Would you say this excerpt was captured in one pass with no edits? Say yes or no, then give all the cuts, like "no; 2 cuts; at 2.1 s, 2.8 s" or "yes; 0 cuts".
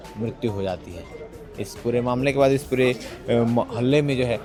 yes; 0 cuts